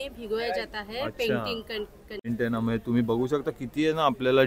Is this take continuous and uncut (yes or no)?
no